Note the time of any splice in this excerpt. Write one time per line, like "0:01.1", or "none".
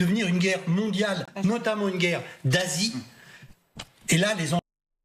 none